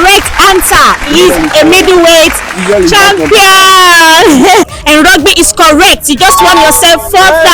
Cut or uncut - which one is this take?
cut